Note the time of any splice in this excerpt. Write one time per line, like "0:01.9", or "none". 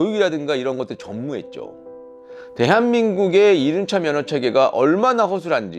0:02.1